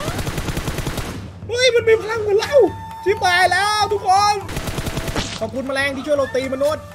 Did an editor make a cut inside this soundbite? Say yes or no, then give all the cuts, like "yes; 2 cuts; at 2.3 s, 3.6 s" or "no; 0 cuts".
yes; 1 cut; at 4.5 s